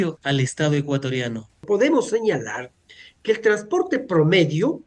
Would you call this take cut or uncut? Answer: cut